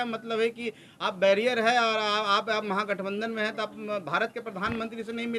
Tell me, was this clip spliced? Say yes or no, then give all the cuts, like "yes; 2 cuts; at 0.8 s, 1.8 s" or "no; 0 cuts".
no; 0 cuts